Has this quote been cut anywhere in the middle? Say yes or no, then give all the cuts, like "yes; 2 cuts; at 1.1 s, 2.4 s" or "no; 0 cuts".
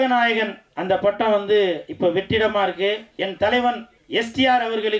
yes; 2 cuts; at 3.1 s, 3.9 s